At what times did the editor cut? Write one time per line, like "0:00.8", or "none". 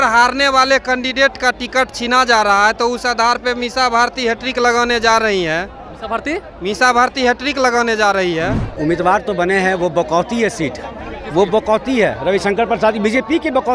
0:08.7